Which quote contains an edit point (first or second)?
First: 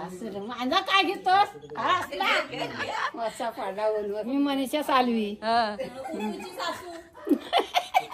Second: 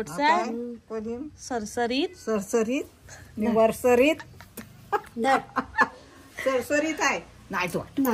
first